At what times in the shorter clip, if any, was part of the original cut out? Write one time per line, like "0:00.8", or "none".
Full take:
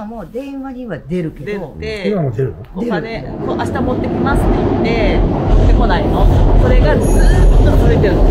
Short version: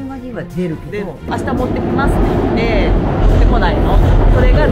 0:01.3